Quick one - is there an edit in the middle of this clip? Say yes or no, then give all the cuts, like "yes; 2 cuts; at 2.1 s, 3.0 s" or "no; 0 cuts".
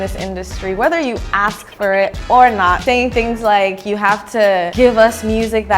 yes; 2 cuts; at 2.8 s, 4.7 s